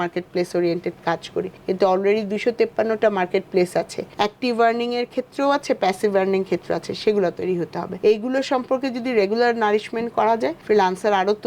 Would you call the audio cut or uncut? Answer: cut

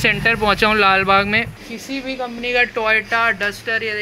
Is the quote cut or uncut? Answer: cut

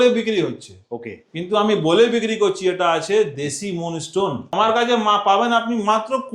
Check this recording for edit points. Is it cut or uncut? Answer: cut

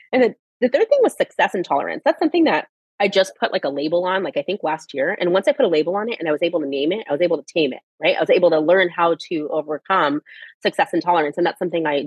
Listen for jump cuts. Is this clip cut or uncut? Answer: uncut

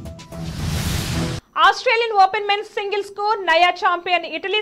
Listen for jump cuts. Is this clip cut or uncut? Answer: cut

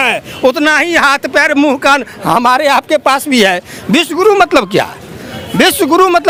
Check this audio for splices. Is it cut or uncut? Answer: uncut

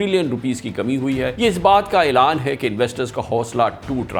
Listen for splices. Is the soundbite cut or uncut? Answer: uncut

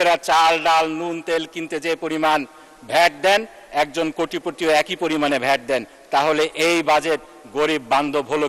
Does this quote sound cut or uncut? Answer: uncut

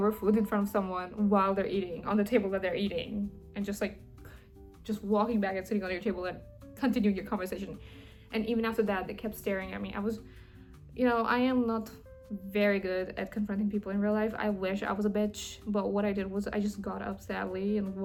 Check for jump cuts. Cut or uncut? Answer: uncut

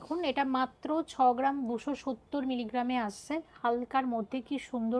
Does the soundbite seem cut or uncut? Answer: uncut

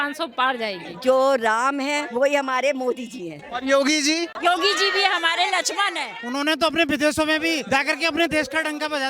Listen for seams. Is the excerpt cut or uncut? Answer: cut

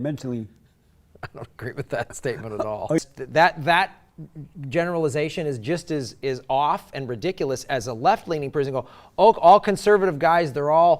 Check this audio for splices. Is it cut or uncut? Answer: cut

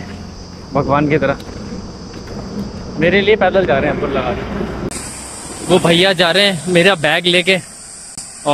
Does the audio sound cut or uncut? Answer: uncut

